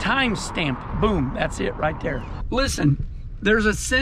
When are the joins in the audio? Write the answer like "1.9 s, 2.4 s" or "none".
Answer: 2.3 s